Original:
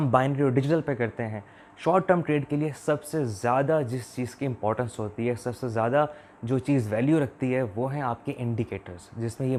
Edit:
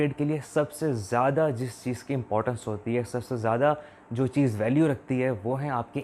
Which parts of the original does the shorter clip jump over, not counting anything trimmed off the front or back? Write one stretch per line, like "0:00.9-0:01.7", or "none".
none